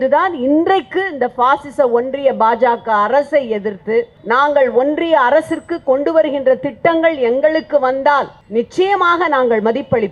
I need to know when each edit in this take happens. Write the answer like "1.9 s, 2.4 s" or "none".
4.2 s, 8.4 s